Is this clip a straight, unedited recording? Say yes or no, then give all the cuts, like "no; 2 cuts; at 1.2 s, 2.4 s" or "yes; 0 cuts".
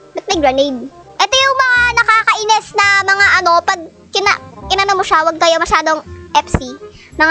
no; 1 cut; at 1.0 s